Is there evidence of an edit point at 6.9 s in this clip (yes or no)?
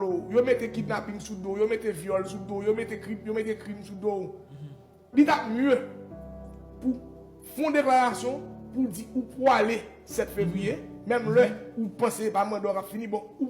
no